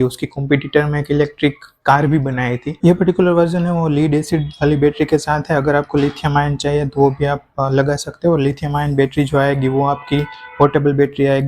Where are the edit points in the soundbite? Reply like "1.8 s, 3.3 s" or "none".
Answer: 2.7 s